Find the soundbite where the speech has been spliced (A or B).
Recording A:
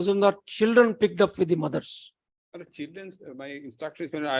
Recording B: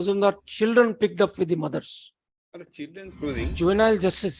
B